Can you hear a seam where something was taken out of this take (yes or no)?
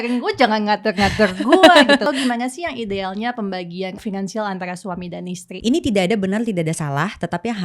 yes